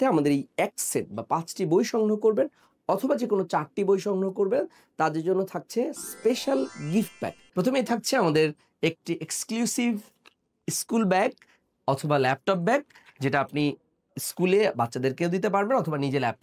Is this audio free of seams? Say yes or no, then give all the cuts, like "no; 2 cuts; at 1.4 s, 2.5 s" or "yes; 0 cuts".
yes; 0 cuts